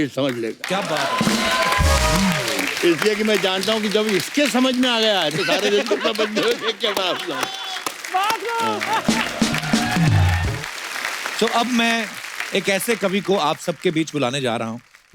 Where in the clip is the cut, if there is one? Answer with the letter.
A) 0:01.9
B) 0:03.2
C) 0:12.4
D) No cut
D